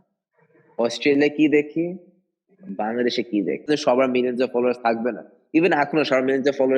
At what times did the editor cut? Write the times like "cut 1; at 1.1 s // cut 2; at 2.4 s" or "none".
cut 1; at 3.7 s